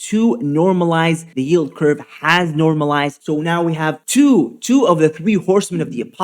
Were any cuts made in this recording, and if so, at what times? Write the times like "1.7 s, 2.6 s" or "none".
1.3 s, 3.2 s, 4.0 s